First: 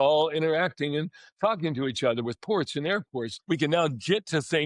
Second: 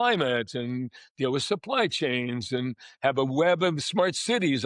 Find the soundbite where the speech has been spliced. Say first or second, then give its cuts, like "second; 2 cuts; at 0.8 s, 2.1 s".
first; 1 cut; at 3.3 s